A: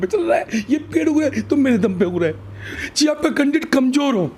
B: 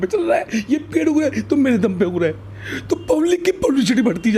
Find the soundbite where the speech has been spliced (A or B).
A